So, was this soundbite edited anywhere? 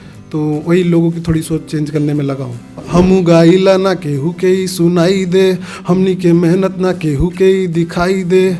yes; 1 cut; at 2.8 s

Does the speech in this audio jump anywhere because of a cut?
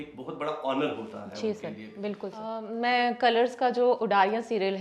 yes; 1 cut; at 2.6 s

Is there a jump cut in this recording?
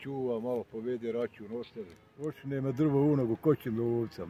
yes; 1 cut; at 2.5 s

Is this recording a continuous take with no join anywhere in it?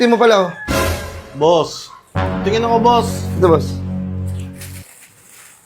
yes; 0 cuts

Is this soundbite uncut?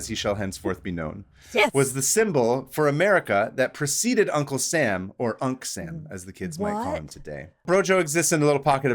no; 1 cut; at 7.6 s

